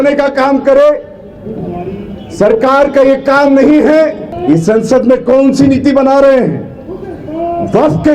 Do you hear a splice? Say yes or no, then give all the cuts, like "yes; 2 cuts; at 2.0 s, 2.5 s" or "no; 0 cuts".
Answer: yes; 1 cut; at 4.3 s